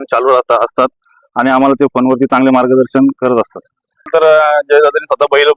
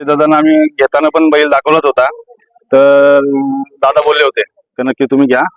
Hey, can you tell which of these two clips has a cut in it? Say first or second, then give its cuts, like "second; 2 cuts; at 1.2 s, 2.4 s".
first; 1 cut; at 4.1 s